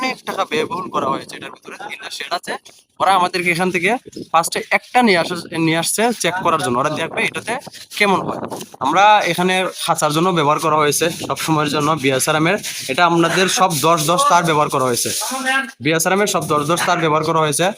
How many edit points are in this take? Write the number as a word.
one